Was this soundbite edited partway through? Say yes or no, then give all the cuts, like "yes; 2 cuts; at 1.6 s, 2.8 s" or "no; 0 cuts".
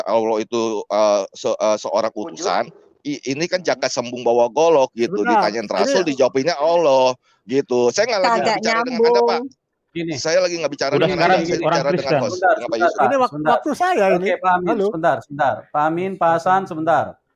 no; 0 cuts